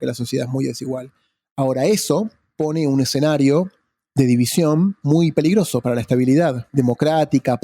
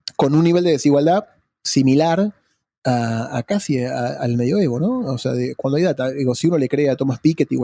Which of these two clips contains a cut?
first; 2 cuts; at 2.4 s, 5.0 s

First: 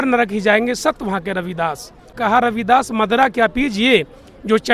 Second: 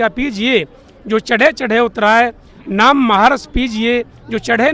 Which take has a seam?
first; 1 cut; at 2.1 s

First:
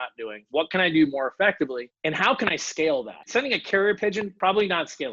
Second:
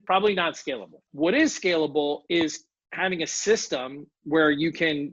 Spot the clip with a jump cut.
first; 2 cuts; at 1.9 s, 3.2 s

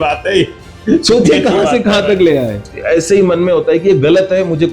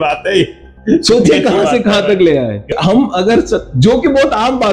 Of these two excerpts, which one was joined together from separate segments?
first; 1 cut; at 2.6 s

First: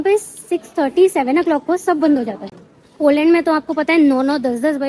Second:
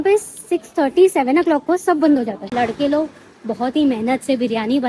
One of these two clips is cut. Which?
second; 1 cut; at 2.5 s

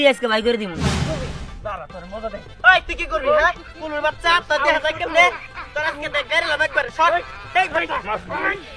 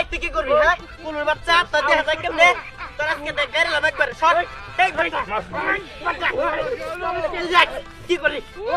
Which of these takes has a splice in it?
first; 1 cut; at 1.0 s

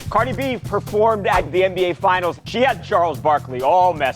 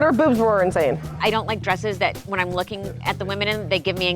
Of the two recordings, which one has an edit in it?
second; 1 cut; at 1.0 s

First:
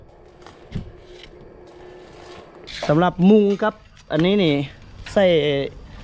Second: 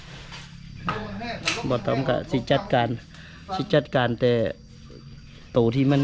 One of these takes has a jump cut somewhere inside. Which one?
first; 1 cut; at 2.6 s

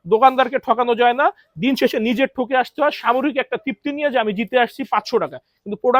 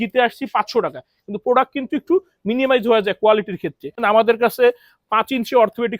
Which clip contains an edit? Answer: second; 1 cut; at 4.0 s

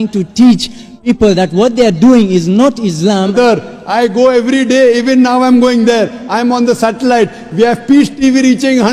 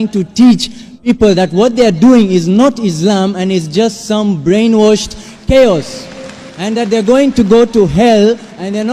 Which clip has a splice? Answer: first; 1 cut; at 3.3 s

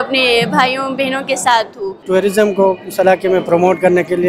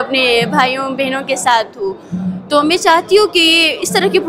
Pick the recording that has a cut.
first; 1 cut; at 2.0 s

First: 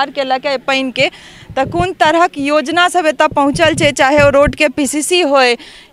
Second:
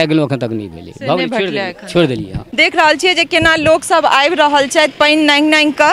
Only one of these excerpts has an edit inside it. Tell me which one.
second; 1 cut; at 2.4 s

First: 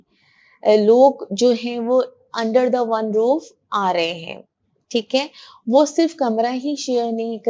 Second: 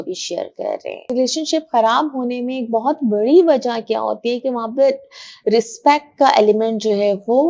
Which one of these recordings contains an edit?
second; 1 cut; at 1.1 s

